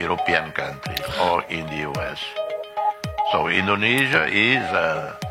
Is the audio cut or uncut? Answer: uncut